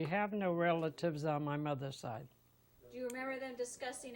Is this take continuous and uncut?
yes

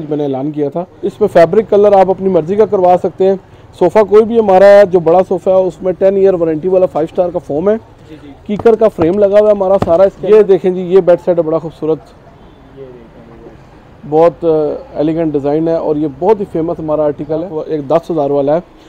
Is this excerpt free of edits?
no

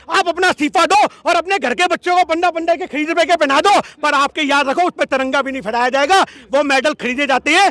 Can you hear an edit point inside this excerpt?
no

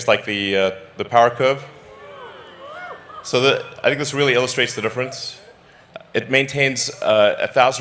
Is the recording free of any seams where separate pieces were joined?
yes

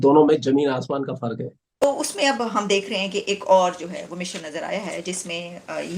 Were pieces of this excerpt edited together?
yes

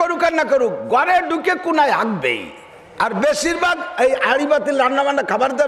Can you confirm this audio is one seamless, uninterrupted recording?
yes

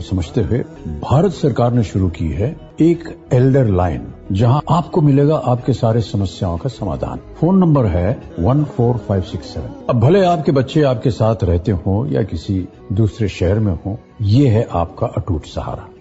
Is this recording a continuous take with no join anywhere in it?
yes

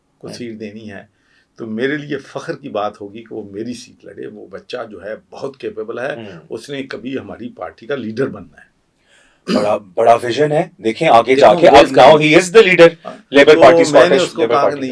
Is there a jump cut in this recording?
no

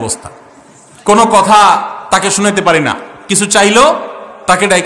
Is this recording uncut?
yes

